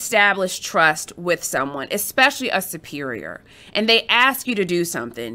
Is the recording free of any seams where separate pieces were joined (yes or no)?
yes